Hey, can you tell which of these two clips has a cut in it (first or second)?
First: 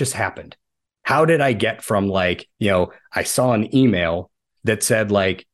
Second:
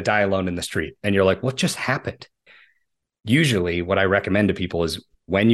second